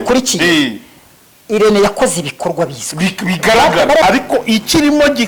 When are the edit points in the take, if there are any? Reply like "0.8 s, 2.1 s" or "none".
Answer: 4.0 s